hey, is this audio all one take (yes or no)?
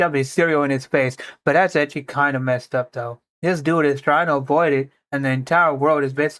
yes